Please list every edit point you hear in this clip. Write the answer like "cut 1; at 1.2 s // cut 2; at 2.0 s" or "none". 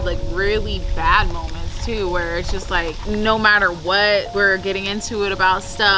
cut 1; at 3.0 s // cut 2; at 4.3 s

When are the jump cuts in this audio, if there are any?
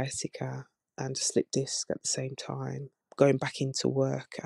none

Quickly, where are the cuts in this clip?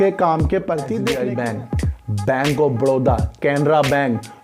cut 1; at 1.0 s

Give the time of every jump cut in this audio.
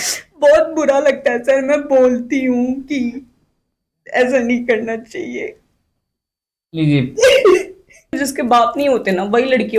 cut 1; at 8.2 s

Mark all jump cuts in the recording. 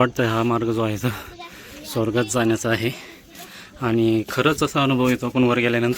none

